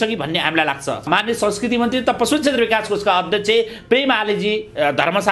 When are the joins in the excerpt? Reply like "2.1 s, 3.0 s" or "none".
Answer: 1.1 s